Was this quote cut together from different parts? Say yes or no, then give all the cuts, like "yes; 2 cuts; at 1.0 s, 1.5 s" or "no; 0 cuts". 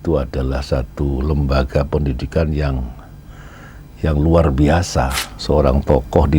yes; 1 cut; at 5.3 s